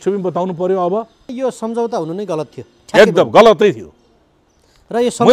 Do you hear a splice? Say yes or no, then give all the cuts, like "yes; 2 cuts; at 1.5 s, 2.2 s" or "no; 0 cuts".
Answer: yes; 1 cut; at 1.3 s